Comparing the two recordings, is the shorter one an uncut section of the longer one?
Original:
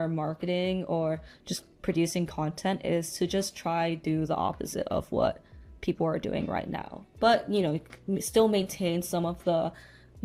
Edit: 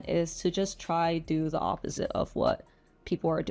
yes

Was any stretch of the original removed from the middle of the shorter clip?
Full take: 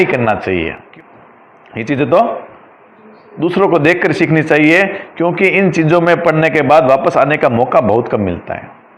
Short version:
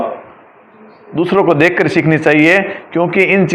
no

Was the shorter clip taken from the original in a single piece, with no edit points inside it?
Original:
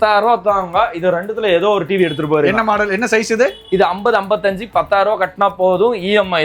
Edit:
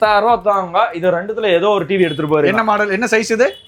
yes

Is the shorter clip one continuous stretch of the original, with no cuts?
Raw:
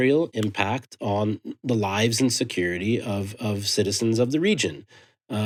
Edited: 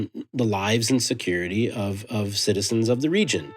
yes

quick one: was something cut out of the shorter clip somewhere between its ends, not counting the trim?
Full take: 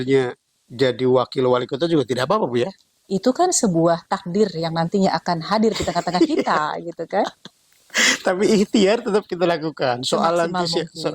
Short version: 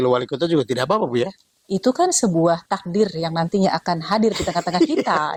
no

